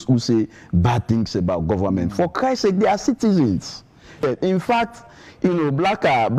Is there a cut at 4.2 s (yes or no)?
yes